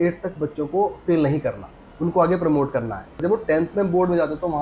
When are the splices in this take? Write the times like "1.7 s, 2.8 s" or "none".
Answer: 3.2 s

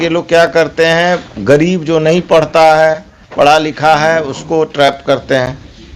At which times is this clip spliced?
none

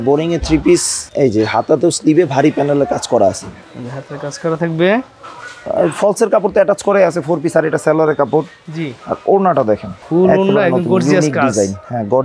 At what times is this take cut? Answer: none

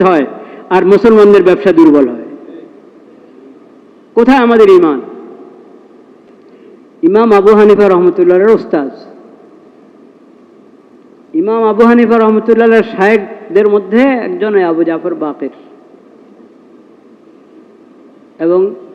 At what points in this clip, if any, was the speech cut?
none

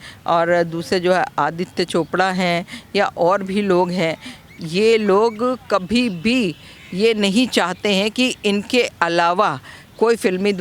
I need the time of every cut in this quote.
none

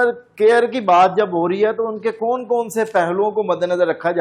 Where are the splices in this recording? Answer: none

